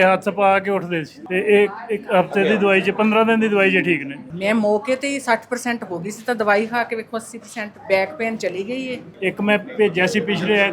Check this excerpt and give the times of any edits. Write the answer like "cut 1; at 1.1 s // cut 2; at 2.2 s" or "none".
cut 1; at 1.2 s // cut 2; at 4.2 s // cut 3; at 9.1 s